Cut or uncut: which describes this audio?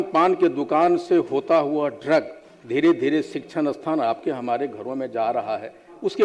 uncut